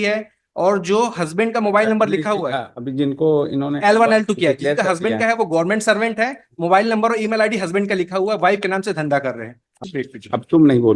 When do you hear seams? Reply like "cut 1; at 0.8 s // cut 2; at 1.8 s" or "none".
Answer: cut 1; at 9.6 s